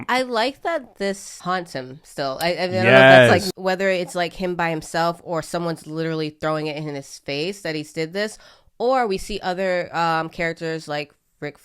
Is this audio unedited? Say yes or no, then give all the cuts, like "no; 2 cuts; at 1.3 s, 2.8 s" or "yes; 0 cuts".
no; 2 cuts; at 1.3 s, 3.5 s